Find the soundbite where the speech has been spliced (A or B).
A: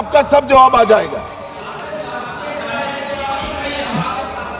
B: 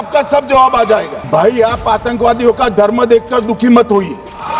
B